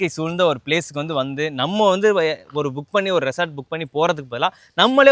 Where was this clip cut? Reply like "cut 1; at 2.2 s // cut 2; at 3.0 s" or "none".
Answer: none